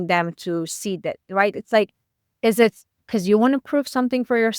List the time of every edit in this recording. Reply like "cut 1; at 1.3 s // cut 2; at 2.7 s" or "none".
none